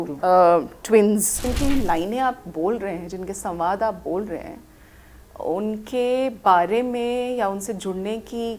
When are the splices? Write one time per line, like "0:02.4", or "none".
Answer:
0:01.4